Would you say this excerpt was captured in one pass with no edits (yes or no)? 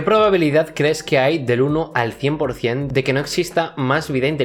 yes